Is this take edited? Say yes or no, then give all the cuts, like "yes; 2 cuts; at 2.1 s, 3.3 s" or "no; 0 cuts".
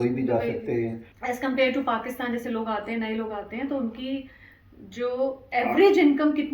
yes; 1 cut; at 1.1 s